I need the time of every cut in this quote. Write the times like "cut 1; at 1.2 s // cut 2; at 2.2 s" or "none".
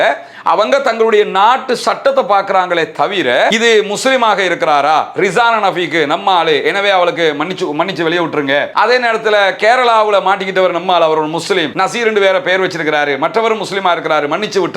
cut 1; at 3.5 s